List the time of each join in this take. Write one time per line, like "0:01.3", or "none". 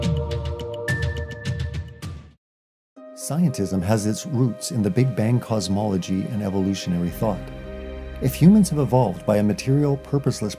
none

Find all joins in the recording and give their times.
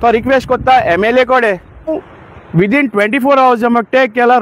0:02.0

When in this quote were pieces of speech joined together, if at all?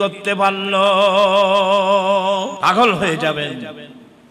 0:02.5

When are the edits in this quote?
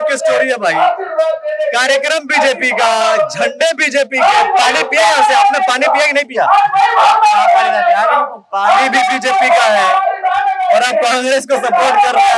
none

